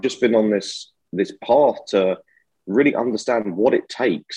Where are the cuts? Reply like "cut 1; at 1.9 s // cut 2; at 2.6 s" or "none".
none